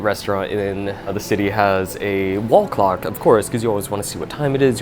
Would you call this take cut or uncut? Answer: cut